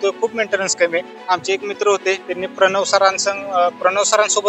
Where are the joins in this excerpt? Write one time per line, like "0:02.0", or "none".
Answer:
0:01.1